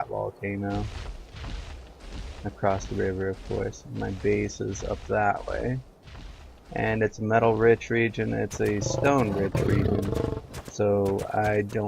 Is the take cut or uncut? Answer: cut